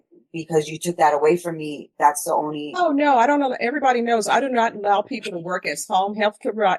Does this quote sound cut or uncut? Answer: cut